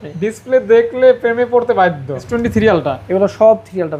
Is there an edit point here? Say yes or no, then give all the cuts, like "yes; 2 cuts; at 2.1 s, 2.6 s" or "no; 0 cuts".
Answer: yes; 1 cut; at 2.3 s